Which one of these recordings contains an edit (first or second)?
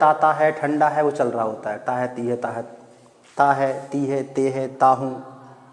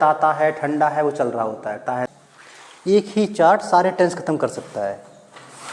second